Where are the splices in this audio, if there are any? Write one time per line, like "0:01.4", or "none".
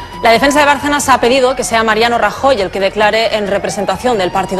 none